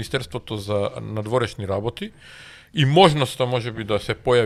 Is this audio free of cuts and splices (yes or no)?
yes